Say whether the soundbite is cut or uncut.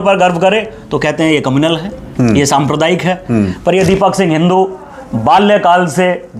uncut